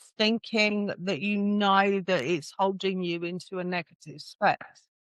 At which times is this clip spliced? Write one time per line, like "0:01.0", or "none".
none